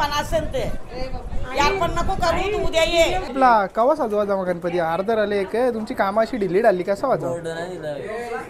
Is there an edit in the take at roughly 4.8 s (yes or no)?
no